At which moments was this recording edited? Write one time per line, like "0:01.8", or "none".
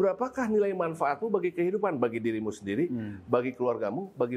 none